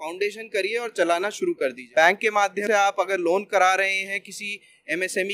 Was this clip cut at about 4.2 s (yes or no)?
no